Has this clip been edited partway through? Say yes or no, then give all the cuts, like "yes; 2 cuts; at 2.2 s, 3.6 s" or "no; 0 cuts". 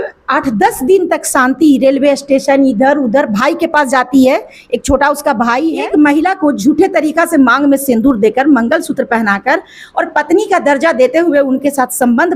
yes; 1 cut; at 5.8 s